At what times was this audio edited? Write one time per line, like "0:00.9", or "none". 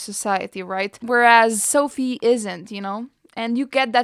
0:01.0